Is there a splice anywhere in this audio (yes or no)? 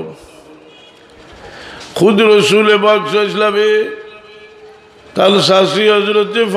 no